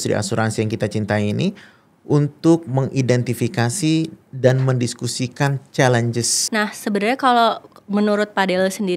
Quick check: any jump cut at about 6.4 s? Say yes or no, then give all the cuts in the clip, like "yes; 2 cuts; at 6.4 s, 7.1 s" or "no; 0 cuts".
yes; 1 cut; at 6.4 s